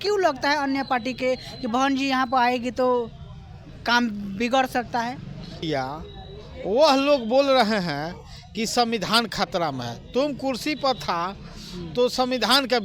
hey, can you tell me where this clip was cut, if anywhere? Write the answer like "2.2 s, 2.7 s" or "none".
5.6 s